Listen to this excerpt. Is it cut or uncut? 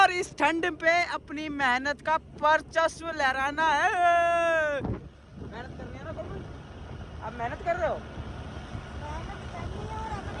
uncut